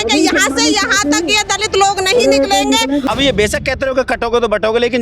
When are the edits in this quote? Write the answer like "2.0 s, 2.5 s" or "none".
3.0 s